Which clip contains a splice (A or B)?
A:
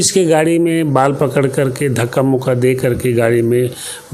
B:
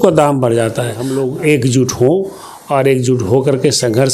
B